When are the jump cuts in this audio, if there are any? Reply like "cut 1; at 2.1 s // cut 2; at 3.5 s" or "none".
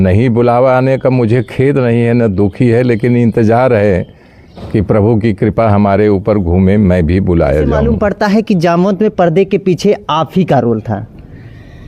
cut 1; at 7.9 s